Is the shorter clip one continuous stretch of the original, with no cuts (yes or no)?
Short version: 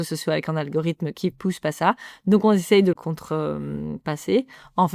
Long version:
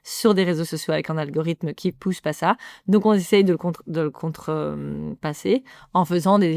no